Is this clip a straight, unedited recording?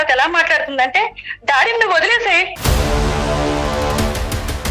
no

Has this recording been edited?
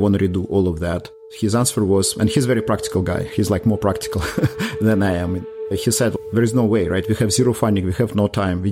yes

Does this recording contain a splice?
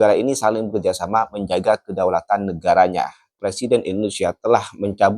yes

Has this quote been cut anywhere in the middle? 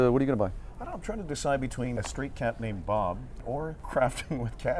yes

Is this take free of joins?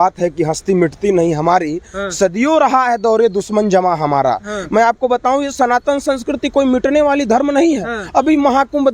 yes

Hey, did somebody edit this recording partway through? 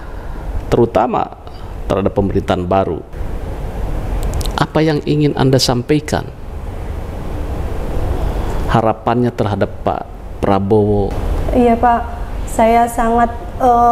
yes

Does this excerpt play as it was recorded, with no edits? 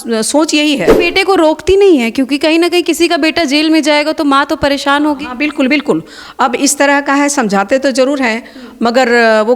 no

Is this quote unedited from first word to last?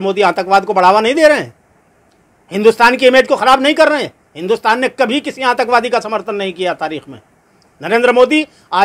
yes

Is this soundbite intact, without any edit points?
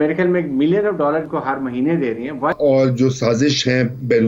no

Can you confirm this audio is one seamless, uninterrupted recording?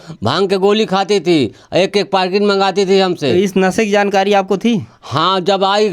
yes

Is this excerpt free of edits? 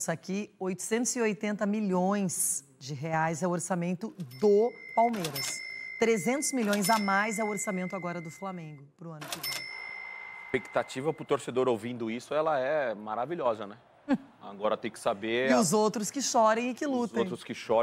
yes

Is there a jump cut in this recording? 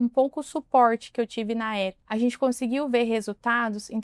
yes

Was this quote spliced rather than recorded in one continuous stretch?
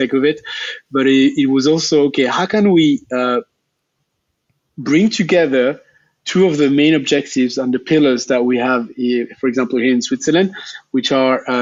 no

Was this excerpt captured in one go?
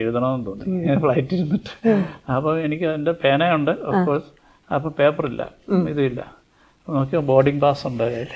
yes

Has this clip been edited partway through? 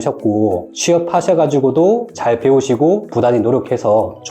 yes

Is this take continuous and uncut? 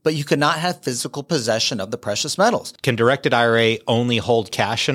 no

